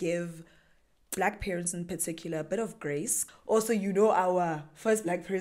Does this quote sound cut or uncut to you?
cut